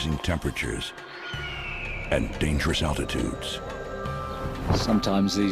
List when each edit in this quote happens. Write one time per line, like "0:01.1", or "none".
none